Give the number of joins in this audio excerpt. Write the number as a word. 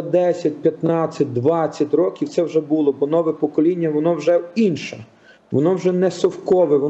zero